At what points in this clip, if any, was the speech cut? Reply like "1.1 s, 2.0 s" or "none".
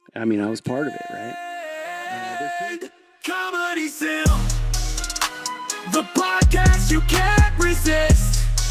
1.1 s